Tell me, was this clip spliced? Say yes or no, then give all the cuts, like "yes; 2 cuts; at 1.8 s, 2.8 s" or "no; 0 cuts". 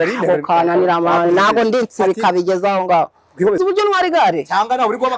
yes; 1 cut; at 3.6 s